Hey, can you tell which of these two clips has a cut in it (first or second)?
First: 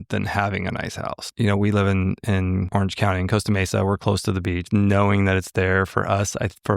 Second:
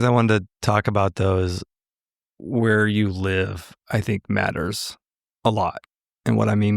first